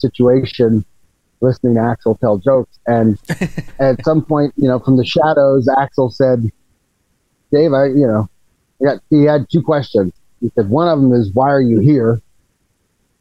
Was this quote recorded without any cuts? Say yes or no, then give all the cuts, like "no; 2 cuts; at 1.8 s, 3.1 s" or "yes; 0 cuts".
yes; 0 cuts